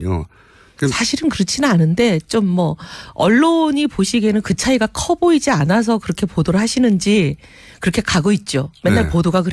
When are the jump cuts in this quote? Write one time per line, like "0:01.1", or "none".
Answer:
0:05.1